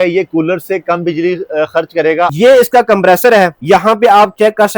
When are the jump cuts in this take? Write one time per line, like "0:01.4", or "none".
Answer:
0:02.3
0:03.6